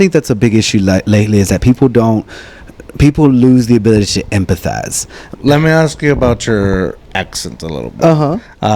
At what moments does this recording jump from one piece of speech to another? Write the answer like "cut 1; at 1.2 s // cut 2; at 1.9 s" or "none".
cut 1; at 5.2 s